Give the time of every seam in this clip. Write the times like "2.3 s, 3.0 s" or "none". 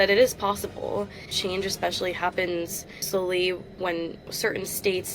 1.4 s, 3.0 s, 4.3 s